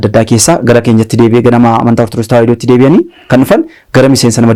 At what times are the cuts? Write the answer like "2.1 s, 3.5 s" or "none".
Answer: none

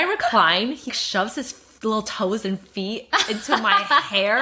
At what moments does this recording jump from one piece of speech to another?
0.9 s

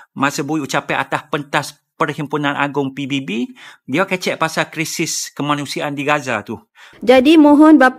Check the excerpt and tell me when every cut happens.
6.8 s

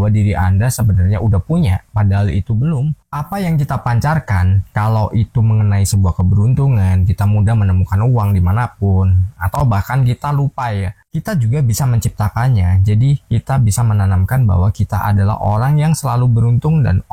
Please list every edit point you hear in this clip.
3.0 s, 11.0 s

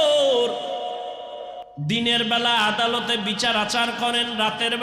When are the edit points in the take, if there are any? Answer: 1.6 s

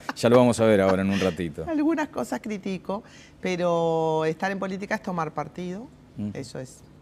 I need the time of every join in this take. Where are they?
none

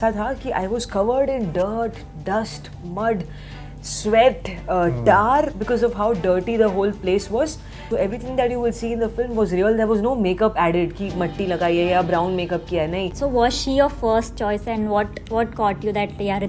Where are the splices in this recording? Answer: 7.9 s, 13.1 s

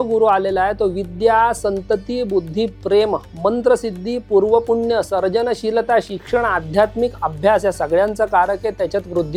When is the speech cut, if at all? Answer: none

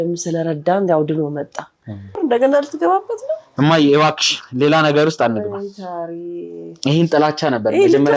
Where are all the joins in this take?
2.1 s

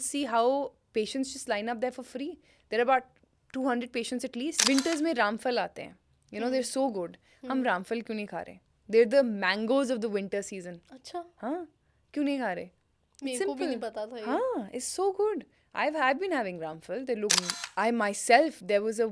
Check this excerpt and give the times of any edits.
4.6 s, 17.4 s

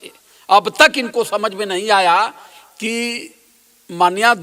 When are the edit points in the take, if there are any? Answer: none

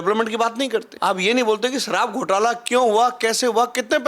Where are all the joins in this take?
0.9 s

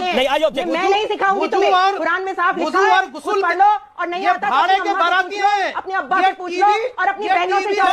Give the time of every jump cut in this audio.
none

